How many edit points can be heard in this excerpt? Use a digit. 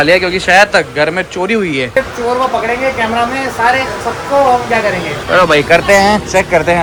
0